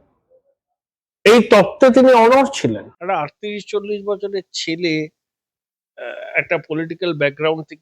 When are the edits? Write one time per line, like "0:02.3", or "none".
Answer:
0:02.9